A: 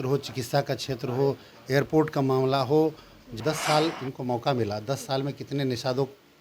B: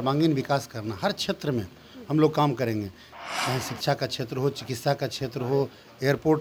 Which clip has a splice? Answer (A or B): A